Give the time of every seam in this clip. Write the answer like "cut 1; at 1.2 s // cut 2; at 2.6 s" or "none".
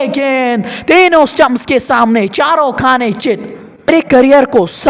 cut 1; at 3.9 s